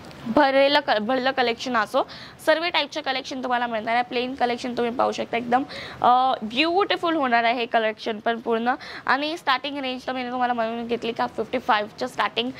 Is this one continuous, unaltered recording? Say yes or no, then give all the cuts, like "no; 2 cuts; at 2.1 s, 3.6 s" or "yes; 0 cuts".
yes; 0 cuts